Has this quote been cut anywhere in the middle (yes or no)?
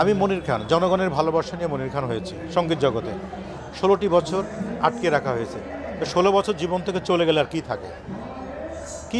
no